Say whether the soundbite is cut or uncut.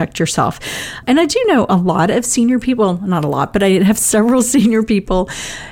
cut